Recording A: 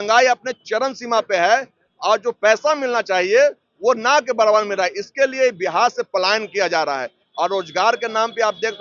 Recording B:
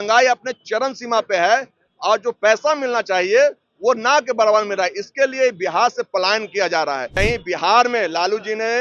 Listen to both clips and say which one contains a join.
B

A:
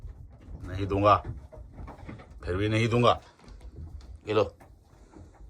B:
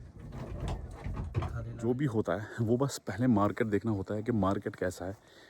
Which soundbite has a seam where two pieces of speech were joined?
B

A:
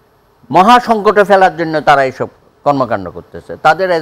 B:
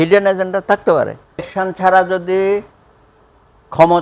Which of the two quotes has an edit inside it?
B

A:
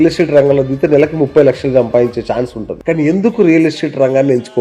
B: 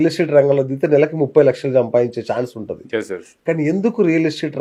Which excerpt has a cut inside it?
A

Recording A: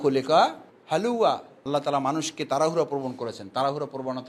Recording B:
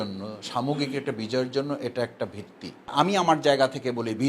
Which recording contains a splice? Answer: B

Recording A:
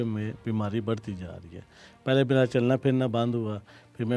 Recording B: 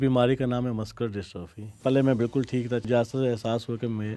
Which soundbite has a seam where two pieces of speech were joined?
B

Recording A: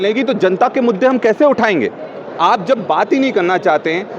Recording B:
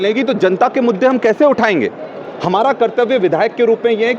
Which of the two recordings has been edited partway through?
A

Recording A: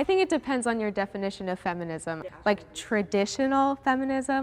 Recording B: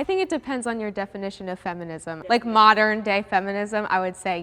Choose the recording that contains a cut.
A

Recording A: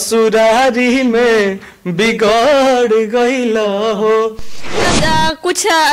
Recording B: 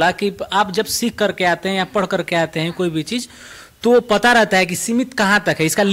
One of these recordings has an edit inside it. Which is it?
A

